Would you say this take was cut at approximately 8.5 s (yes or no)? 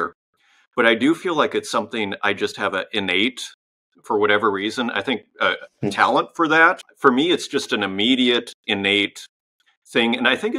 no